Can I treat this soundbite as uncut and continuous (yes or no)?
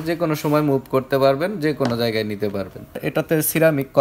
no